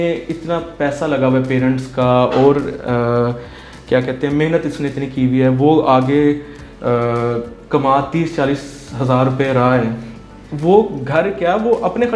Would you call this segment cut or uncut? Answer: uncut